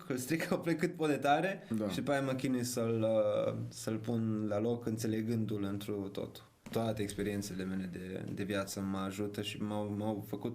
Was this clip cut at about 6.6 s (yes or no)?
yes